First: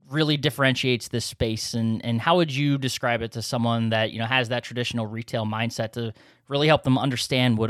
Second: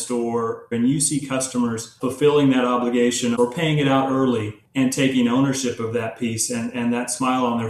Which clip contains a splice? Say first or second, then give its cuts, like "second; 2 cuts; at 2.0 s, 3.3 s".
second; 4 cuts; at 0.7 s, 1.9 s, 3.3 s, 4.6 s